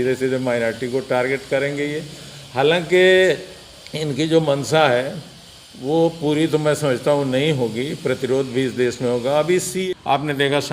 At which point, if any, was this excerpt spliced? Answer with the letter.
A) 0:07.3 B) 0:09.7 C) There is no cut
B